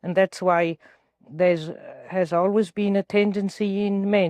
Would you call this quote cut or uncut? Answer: uncut